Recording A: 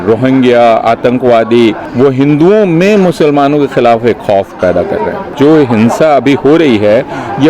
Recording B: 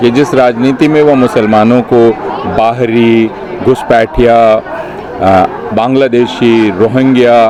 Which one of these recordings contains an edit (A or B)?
A